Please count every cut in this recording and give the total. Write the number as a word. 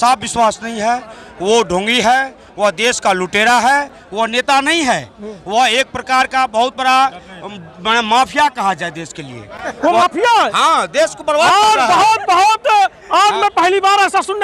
zero